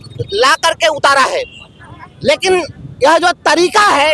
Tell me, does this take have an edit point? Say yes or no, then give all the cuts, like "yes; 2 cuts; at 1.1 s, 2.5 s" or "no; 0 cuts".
no; 0 cuts